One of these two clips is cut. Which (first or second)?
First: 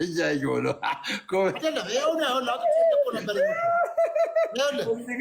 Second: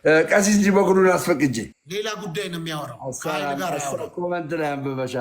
second